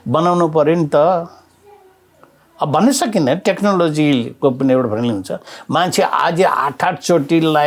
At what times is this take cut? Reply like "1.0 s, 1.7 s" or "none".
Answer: none